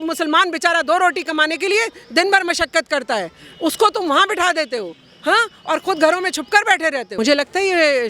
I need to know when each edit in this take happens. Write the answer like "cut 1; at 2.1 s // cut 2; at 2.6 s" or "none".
cut 1; at 7.1 s